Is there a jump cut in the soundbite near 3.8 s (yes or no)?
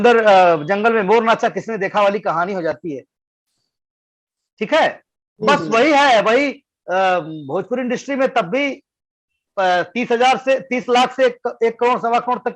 no